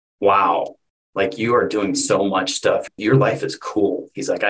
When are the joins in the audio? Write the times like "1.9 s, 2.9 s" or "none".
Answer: 2.9 s